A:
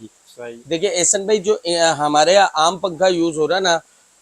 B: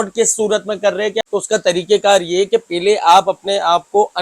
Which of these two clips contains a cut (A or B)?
B